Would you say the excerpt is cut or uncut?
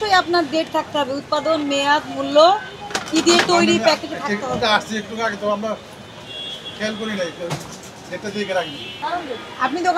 uncut